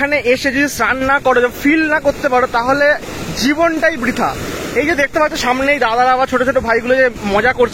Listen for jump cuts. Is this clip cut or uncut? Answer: uncut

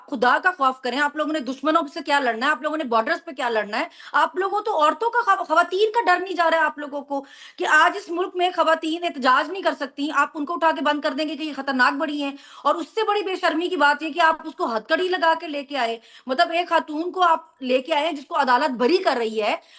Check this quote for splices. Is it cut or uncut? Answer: uncut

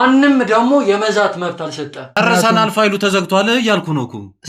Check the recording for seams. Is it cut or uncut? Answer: cut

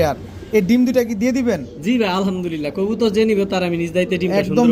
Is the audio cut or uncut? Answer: uncut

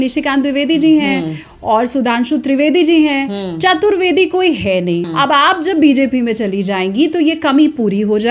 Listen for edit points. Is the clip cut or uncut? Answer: cut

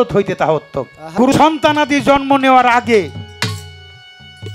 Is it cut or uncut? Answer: cut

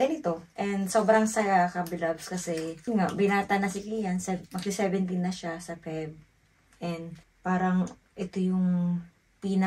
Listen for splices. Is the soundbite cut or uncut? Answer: uncut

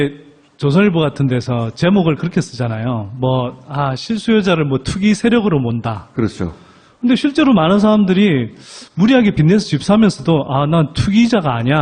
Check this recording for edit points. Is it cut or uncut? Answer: cut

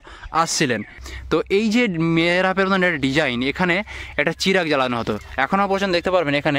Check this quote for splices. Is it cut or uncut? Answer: cut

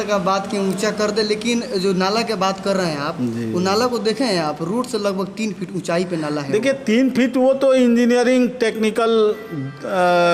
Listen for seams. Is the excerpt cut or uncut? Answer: uncut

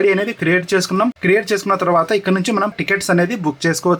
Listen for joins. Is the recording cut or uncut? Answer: cut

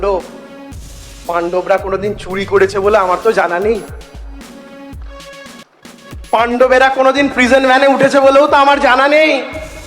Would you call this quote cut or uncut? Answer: cut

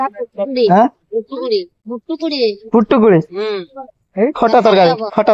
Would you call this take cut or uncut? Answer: cut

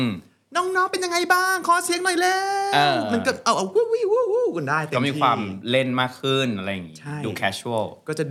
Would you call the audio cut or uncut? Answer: uncut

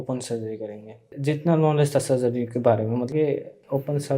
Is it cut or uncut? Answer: cut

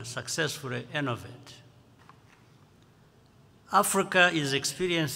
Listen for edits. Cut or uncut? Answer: cut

